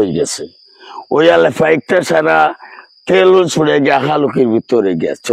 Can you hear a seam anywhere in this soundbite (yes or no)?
no